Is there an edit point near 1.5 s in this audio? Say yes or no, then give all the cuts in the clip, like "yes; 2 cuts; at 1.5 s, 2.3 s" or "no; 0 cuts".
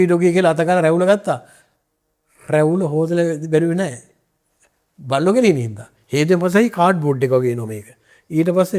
no; 0 cuts